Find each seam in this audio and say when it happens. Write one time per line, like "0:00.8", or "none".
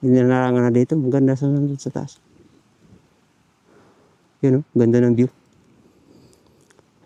none